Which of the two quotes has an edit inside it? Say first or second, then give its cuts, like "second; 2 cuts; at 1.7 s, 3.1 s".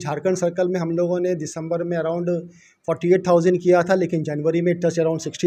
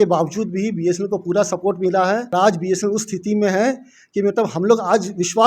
second; 1 cut; at 2.3 s